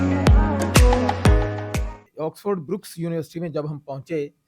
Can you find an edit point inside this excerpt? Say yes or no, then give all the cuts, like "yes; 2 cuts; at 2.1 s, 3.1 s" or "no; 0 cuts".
yes; 1 cut; at 1.7 s